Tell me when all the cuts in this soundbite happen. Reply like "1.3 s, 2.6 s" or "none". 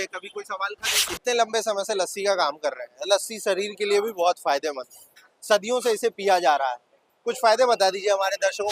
1.1 s